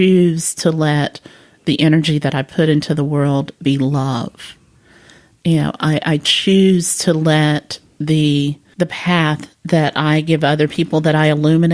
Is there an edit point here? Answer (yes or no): yes